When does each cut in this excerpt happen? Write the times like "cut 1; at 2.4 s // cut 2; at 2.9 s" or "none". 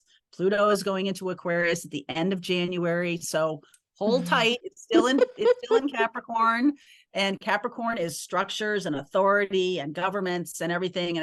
none